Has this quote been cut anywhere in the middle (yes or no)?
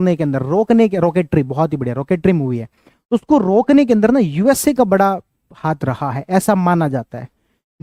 no